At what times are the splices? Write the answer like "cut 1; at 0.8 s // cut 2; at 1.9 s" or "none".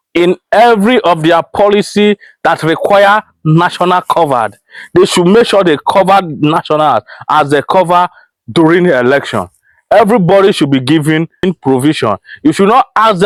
none